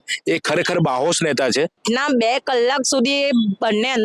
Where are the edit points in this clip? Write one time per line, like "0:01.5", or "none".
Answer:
0:01.8

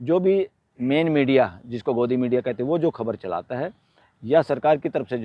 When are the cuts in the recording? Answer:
none

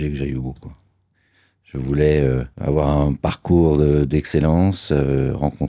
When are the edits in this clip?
0:02.5

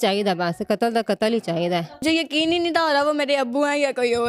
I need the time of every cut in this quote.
0:02.0

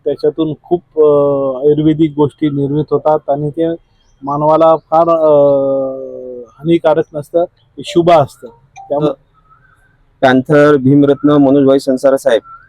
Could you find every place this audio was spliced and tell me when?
0:09.0

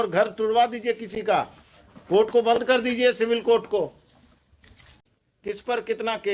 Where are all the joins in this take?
none

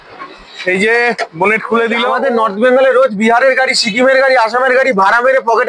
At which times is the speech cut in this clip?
0:02.1

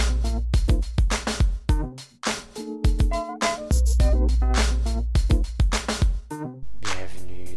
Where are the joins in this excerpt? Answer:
0:01.6
0:06.2

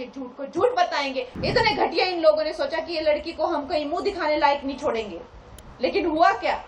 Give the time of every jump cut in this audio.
0:01.3

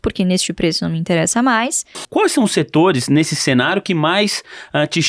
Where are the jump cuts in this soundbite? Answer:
0:02.0

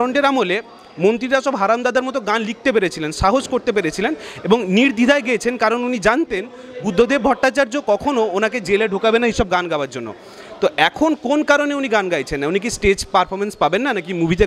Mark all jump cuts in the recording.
none

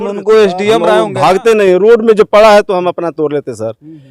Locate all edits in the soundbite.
0:01.0

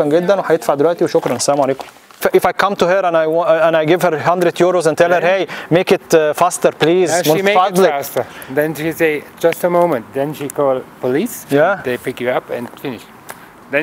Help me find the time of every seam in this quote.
0:02.2

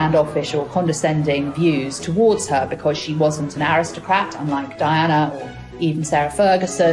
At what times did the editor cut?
none

